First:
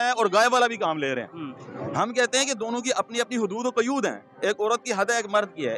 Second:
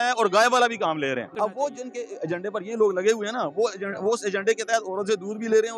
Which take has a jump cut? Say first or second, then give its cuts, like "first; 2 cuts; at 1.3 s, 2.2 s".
second; 1 cut; at 1.3 s